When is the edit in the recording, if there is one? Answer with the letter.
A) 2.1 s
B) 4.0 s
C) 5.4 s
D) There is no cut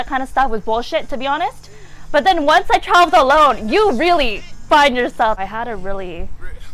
C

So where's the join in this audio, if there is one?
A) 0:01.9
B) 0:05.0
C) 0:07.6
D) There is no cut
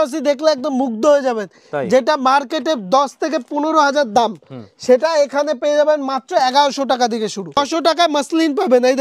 C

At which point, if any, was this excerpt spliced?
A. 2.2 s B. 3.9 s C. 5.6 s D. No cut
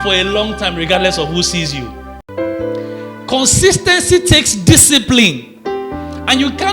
A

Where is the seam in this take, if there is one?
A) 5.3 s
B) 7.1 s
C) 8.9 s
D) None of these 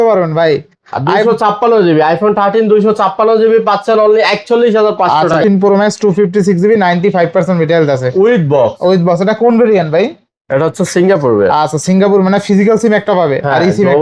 A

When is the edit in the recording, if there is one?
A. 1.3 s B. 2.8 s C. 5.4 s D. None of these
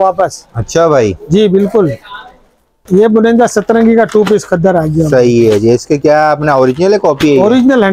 B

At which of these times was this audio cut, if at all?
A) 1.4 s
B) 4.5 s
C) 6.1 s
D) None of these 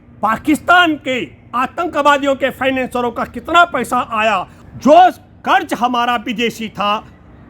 B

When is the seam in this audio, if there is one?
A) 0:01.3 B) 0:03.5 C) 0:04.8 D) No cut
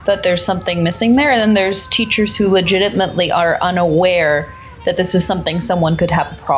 D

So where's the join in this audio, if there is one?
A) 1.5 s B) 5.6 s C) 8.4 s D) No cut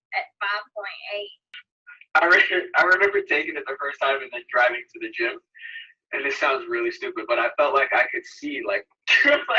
A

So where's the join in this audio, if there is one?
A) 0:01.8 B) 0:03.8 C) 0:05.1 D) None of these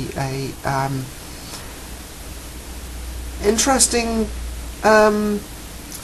A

